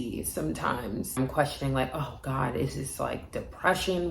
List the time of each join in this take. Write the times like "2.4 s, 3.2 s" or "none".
1.2 s